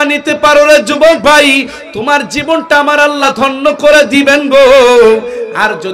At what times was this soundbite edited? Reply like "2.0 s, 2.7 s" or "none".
3.3 s